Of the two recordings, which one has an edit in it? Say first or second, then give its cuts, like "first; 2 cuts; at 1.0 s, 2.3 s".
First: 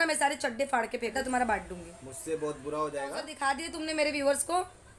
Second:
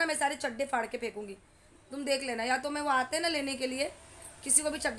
first; 2 cuts; at 1.1 s, 3.3 s